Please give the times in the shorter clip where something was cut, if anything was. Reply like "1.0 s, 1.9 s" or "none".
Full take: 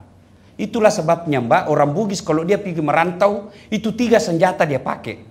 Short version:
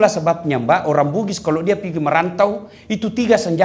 none